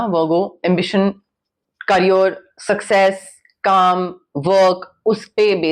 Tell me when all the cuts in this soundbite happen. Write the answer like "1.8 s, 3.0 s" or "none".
none